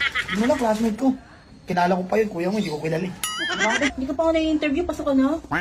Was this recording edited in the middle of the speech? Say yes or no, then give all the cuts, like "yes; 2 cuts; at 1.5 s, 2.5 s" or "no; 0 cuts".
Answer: yes; 1 cut; at 4.0 s